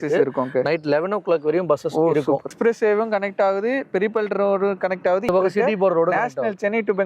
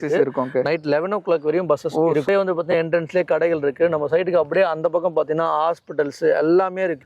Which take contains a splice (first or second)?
first